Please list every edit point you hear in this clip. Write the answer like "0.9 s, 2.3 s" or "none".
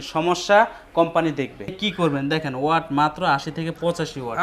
1.7 s